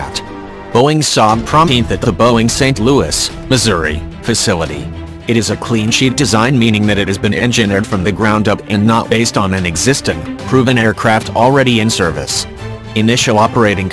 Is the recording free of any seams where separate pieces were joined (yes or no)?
yes